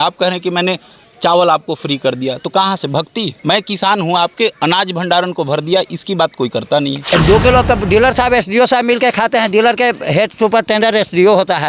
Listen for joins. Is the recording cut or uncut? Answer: cut